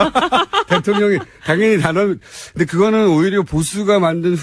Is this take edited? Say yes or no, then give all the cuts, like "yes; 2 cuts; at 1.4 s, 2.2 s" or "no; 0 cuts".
no; 0 cuts